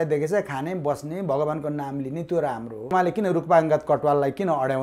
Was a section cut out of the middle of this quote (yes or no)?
yes